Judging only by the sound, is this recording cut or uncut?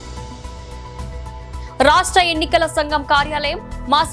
uncut